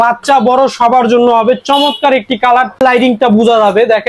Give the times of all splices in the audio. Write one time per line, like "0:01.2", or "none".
0:02.8